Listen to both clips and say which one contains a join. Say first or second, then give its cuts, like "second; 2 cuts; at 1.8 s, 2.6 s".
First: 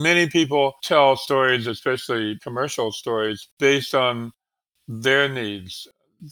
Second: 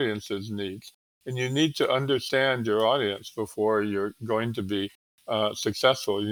first; 3 cuts; at 0.8 s, 2.4 s, 3.5 s